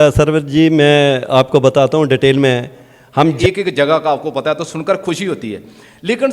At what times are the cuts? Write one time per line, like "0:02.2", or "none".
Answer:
0:03.4